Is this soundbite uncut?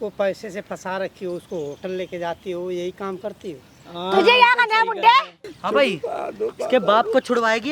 no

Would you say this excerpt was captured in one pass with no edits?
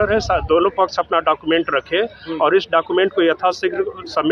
yes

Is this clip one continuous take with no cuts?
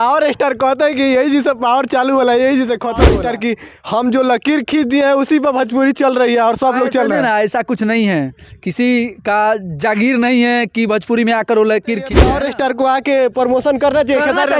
no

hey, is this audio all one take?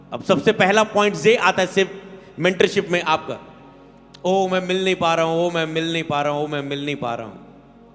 yes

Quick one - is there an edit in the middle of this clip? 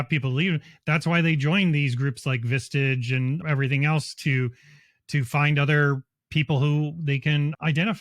yes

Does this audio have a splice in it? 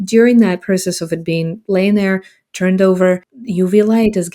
yes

